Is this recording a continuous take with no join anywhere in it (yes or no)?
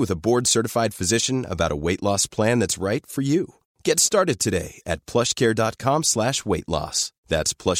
yes